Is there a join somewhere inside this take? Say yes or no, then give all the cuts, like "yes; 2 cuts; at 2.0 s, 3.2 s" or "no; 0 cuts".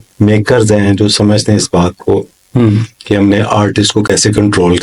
no; 0 cuts